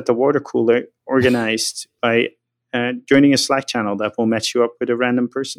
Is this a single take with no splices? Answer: yes; 0 cuts

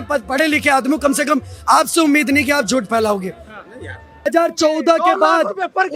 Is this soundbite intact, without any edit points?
no; 1 cut; at 4.3 s

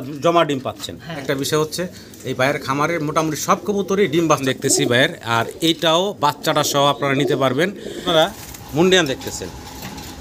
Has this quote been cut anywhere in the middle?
yes; 3 cuts; at 1.2 s, 4.4 s, 8.1 s

